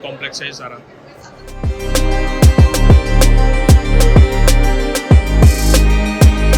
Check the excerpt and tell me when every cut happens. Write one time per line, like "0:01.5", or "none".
none